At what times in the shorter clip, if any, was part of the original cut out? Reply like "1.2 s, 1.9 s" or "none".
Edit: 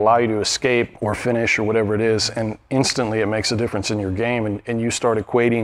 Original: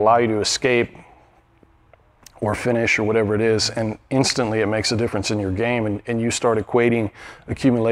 0.9 s